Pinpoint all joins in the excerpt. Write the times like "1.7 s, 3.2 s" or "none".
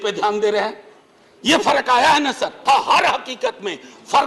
2.6 s